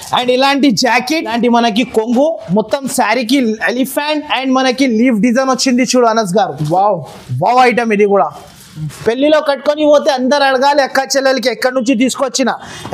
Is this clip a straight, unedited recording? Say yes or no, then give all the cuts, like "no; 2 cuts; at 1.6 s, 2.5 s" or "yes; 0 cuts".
no; 2 cuts; at 1.3 s, 8.8 s